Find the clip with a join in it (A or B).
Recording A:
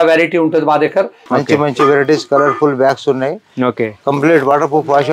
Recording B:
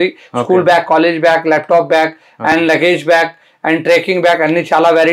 A